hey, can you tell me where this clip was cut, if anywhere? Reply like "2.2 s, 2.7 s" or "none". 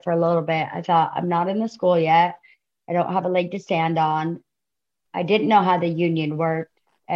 none